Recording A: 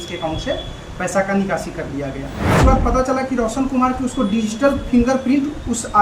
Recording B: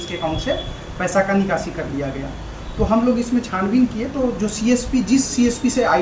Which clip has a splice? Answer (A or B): A